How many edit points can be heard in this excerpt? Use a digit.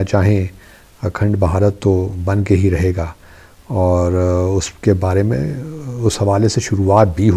0